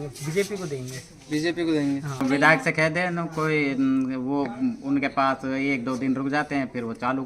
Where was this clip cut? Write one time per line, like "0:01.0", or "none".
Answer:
0:02.2